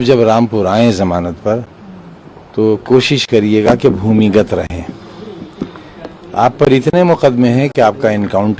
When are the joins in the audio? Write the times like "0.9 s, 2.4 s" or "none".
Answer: none